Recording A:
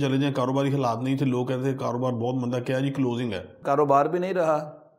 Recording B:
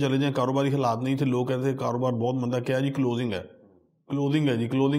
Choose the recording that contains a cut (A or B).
A